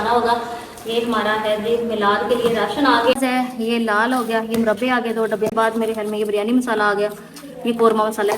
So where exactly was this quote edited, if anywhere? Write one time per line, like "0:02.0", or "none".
0:03.2
0:05.5

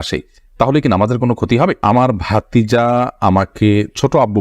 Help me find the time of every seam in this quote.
0:01.8

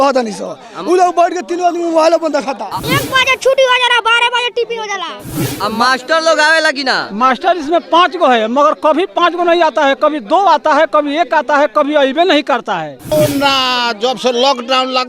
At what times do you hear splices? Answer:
0:02.7
0:05.3
0:13.1

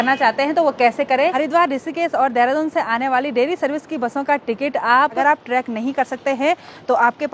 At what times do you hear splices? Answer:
0:01.3
0:05.2

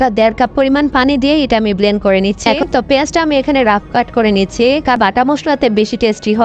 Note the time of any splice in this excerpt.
0:02.6
0:05.0

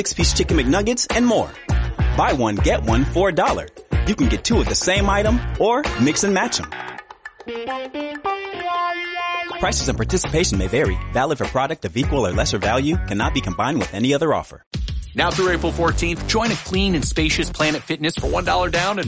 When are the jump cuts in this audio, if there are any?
0:14.6

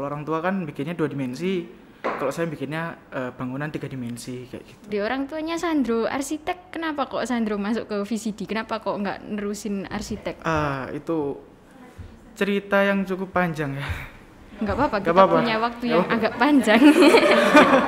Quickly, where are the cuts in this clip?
0:04.9

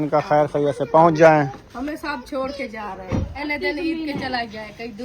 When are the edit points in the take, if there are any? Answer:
0:01.6
0:03.4

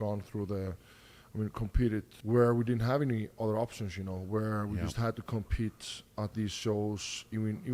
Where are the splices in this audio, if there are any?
0:02.1

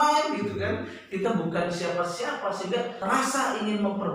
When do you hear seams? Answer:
0:03.1

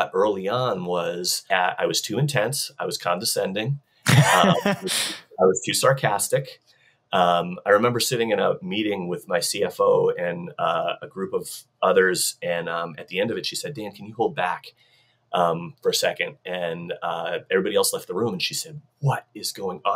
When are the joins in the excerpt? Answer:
0:01.4

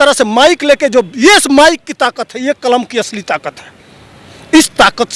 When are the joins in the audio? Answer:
none

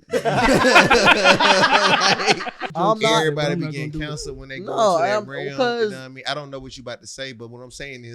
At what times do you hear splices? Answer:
0:02.7

